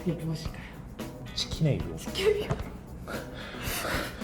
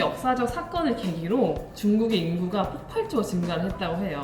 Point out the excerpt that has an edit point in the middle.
first; 1 cut; at 1.2 s

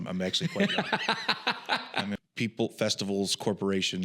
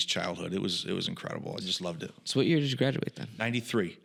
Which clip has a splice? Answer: first; 1 cut; at 2.2 s

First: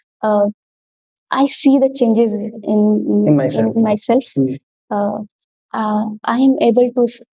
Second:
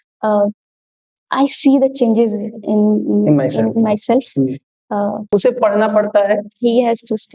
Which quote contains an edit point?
second; 1 cut; at 5.2 s

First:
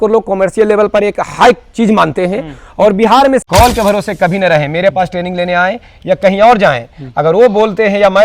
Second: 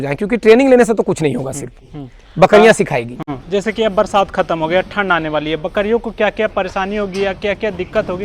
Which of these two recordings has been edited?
first; 1 cut; at 3.4 s

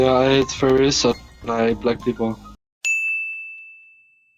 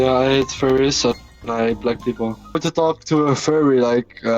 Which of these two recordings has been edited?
second; 1 cut; at 2.6 s

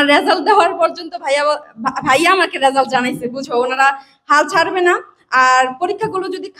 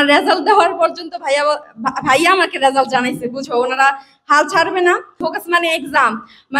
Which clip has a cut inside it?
second; 1 cut; at 5.2 s

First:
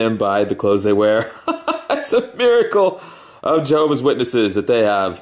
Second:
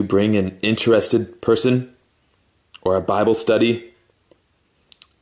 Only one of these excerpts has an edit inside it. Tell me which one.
first; 1 cut; at 4.3 s

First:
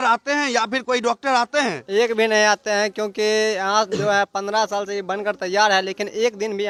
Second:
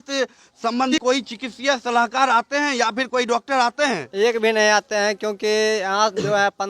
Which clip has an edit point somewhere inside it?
second; 1 cut; at 0.9 s

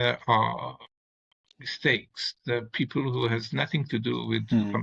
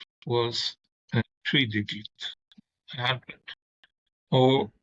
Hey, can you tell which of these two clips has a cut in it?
second; 2 cuts; at 1.2 s, 2.5 s

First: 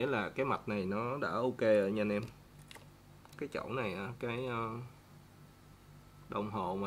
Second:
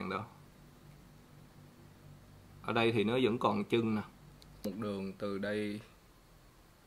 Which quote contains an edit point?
second; 1 cut; at 4.6 s

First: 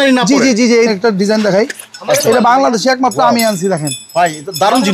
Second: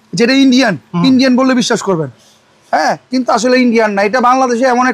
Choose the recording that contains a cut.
first; 1 cut; at 0.9 s

